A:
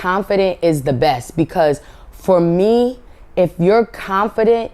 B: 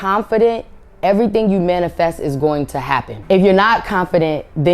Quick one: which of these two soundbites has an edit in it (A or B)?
B